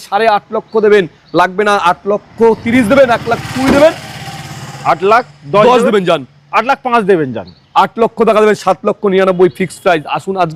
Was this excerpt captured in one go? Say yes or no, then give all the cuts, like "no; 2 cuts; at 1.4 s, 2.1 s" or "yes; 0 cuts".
yes; 0 cuts